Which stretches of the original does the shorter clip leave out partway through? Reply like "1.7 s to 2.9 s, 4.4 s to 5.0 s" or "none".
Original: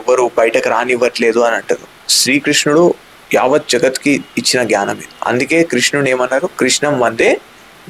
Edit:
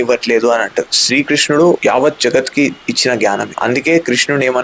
1.9 s to 2.1 s, 3.0 s to 3.3 s, 5.0 s to 5.1 s

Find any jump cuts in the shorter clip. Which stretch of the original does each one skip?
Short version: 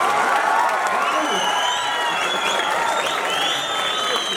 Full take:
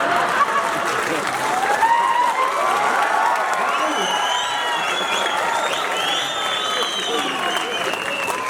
none

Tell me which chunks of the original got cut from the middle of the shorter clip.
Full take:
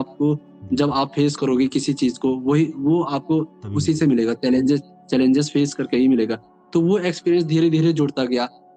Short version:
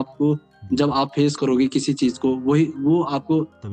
none

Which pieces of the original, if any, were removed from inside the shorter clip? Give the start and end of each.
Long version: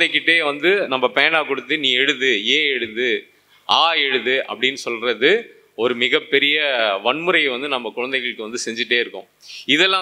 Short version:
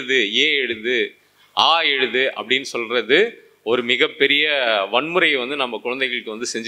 none

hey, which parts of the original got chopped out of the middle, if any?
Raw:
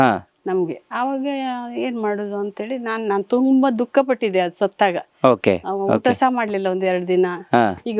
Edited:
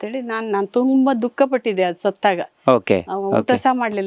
none

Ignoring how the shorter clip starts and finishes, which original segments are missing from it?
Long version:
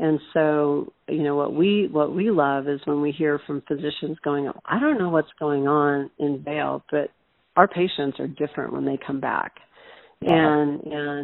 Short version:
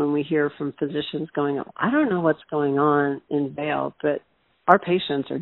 none

